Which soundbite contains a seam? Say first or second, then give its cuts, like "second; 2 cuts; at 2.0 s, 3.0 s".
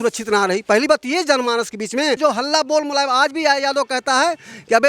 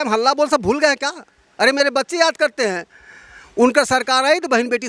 first; 1 cut; at 2.2 s